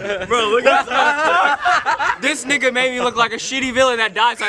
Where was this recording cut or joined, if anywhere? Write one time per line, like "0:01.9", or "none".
none